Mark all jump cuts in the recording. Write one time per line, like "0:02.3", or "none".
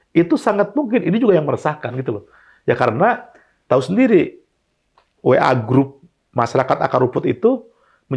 none